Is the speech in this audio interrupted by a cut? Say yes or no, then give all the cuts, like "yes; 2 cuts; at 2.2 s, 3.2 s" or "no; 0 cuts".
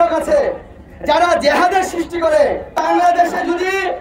yes; 1 cut; at 2.7 s